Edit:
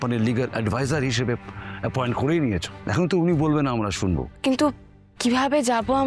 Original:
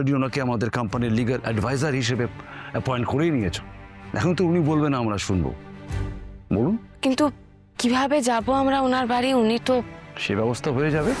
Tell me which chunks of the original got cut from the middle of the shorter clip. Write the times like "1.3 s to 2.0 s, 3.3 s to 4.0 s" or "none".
3.7 s to 4.0 s, 5.6 s to 6.9 s